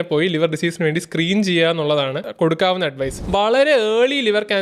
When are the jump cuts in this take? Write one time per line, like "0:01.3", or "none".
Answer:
0:02.2
0:03.2